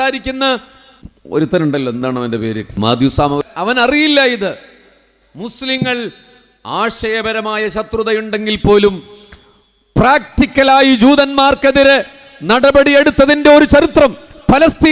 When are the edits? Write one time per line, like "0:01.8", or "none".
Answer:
0:02.8
0:03.4